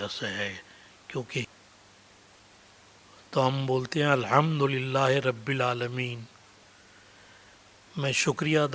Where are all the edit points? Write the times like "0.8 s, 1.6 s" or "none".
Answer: 1.4 s

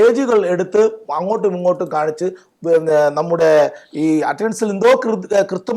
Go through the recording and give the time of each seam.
none

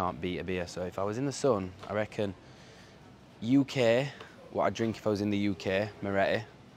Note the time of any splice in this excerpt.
none

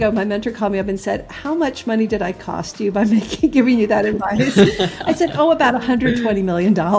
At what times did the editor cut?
none

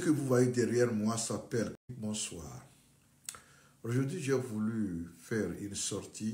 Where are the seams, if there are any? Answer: 1.9 s

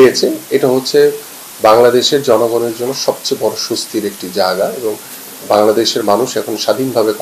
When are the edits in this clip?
none

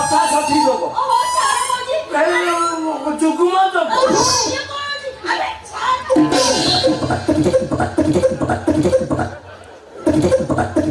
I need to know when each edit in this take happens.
none

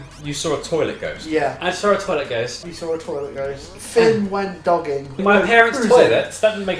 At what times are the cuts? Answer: 2.6 s, 3.8 s, 5.2 s

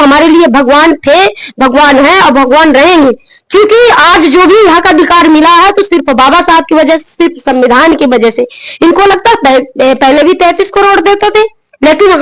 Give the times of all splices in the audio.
none

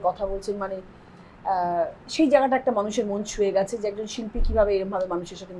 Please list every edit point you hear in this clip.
none

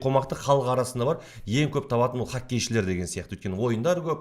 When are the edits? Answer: none

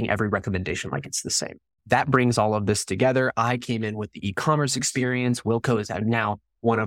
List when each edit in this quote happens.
1.7 s

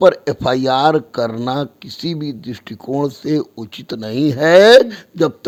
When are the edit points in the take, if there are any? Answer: none

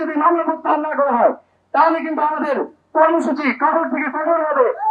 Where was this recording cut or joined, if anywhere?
none

